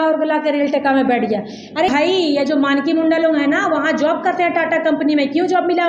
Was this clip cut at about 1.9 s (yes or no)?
yes